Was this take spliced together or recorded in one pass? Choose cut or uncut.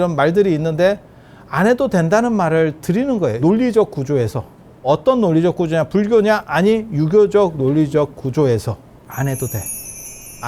cut